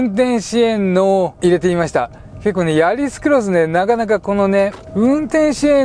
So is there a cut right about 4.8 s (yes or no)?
yes